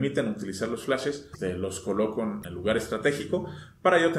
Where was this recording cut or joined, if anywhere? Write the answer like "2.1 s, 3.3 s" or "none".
1.3 s, 2.4 s